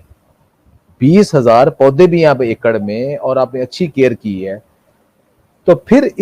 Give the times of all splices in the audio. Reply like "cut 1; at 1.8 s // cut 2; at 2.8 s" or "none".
none